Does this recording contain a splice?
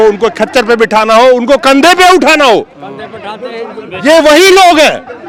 no; 0 cuts

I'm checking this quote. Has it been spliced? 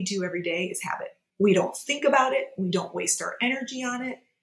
yes; 1 cut; at 1.2 s

